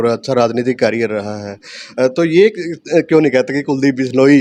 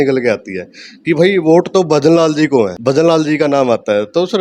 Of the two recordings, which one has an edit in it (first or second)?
second